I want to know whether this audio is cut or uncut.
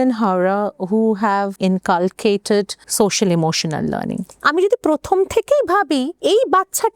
cut